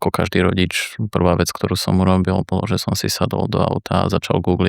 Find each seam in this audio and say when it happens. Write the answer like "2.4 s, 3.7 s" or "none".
none